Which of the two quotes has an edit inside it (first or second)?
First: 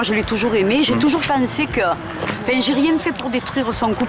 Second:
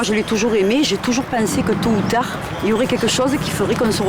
second